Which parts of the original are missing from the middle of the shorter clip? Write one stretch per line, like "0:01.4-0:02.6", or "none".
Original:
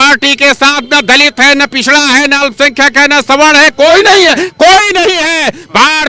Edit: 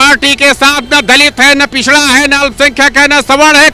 none